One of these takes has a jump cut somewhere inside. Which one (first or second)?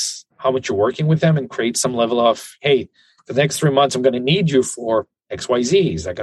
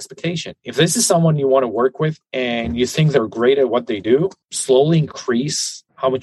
second